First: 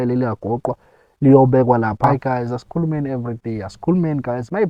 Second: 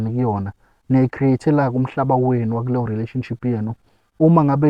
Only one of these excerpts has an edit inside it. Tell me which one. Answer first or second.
first